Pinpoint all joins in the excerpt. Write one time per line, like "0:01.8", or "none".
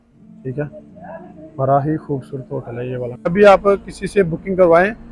0:03.3